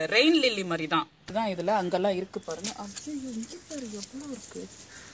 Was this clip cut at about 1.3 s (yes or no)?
yes